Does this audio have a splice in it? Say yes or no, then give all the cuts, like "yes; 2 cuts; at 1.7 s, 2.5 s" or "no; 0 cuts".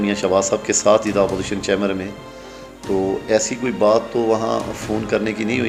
no; 0 cuts